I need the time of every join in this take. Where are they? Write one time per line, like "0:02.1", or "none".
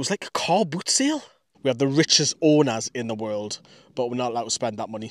0:01.5